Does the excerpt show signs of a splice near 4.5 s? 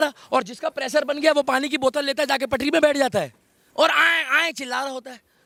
no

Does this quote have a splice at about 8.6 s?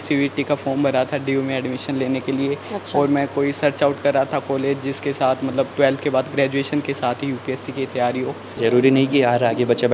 yes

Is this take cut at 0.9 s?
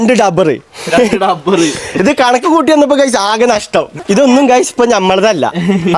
no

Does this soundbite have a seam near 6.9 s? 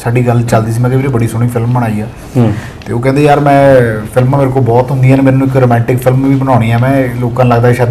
no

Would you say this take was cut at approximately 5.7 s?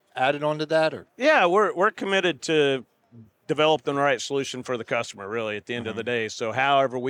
no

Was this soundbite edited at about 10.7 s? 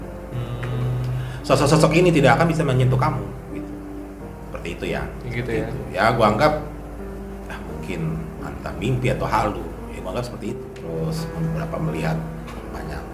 yes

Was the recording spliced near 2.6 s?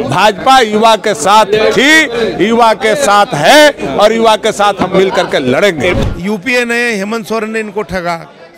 no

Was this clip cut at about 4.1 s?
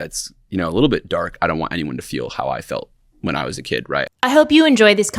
yes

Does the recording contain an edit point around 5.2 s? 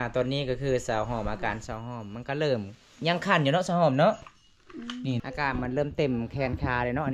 yes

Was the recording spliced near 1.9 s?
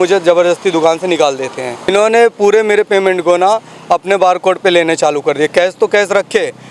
yes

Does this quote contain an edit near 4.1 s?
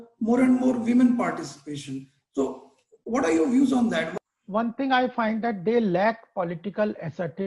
yes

